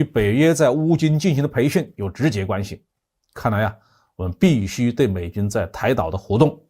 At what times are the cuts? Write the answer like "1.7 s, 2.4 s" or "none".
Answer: none